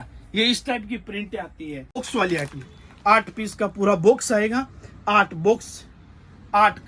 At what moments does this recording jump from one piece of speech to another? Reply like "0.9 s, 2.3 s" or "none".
2.0 s